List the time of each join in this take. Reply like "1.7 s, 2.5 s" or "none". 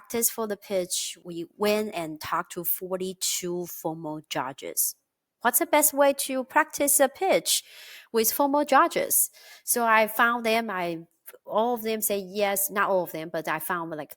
1.2 s